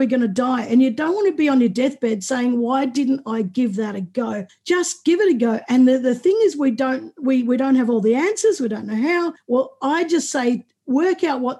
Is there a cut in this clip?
yes; 2 cuts; at 4.5 s, 9.4 s

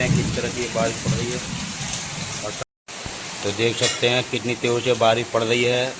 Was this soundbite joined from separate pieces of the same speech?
yes; 1 cut; at 2.6 s

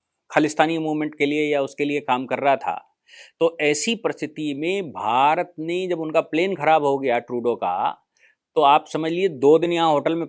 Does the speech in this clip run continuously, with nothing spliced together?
yes; 0 cuts

